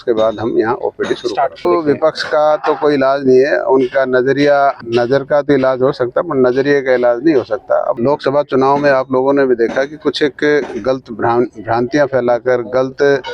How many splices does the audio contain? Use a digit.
3